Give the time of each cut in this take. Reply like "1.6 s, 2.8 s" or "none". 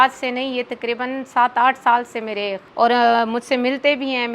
2.6 s